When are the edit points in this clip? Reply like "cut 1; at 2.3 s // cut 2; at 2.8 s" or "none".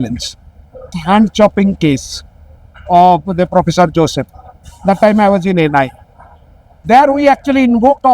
cut 1; at 1.0 s